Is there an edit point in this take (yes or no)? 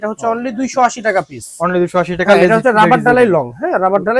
no